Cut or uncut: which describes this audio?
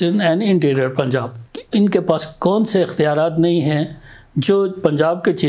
cut